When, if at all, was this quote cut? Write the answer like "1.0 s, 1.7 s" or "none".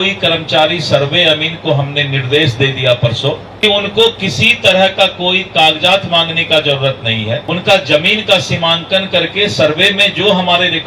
3.6 s, 7.4 s